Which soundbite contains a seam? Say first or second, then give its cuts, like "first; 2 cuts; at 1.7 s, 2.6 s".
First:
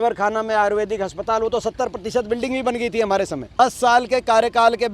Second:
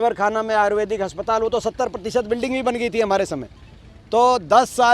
first; 1 cut; at 3.6 s